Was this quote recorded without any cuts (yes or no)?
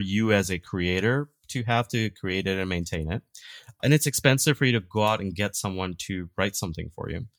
no